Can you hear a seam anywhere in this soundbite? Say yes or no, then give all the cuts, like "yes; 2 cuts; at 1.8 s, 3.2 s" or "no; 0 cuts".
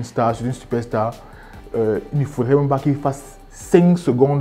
no; 0 cuts